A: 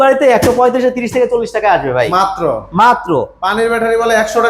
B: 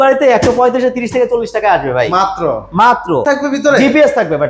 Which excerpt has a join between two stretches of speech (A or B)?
B